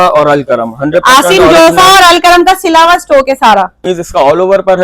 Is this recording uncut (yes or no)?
no